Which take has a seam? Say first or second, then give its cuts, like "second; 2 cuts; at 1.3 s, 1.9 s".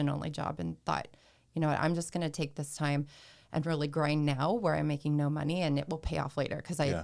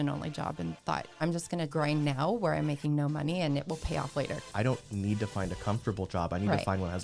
second; 2 cuts; at 1.6 s, 4.4 s